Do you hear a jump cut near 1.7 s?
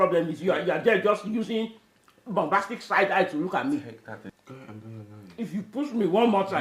no; 1 cut; at 4.3 s

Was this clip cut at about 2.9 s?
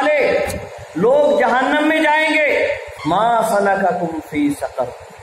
yes; 1 cut; at 2.9 s

